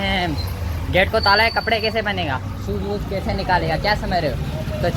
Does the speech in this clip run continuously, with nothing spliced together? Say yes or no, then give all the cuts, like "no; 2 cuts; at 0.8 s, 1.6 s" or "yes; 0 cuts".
yes; 0 cuts